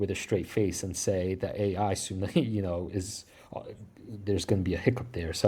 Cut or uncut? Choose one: uncut